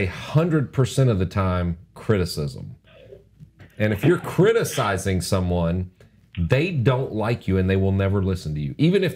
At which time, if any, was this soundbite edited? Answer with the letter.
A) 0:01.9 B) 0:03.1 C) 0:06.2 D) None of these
D